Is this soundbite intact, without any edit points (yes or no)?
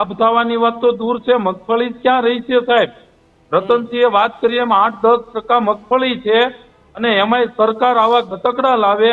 yes